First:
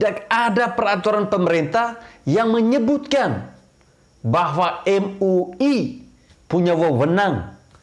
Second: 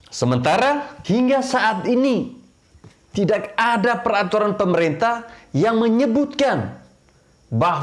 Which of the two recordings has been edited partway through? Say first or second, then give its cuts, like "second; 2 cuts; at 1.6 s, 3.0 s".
second; 1 cut; at 0.9 s